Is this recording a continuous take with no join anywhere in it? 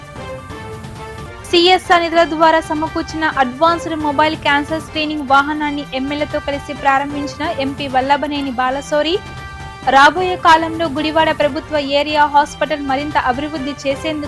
no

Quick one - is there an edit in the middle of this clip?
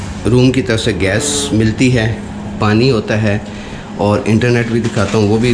no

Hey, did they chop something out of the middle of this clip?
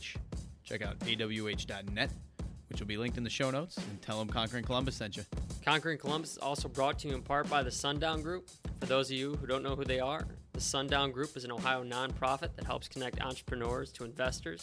yes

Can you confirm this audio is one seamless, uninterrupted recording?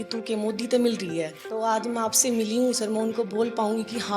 no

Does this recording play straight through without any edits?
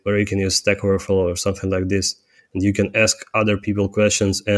yes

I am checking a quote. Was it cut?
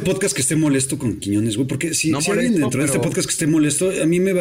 no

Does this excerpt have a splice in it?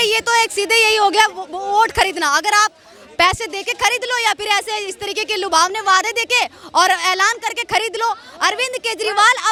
no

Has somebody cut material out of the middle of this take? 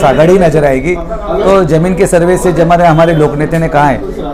no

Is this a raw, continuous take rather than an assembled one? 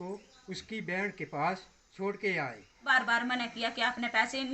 no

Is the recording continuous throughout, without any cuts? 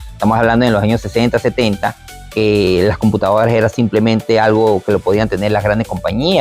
yes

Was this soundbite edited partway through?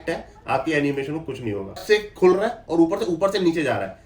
yes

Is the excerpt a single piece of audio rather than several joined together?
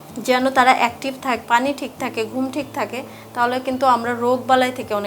no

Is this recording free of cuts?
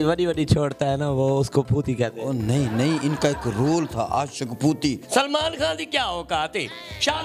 no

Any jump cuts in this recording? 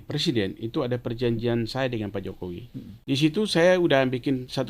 yes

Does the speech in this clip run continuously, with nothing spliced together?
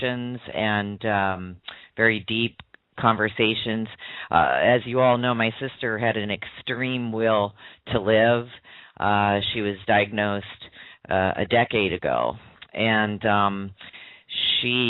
no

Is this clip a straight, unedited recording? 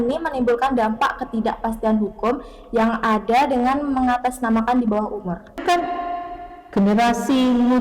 no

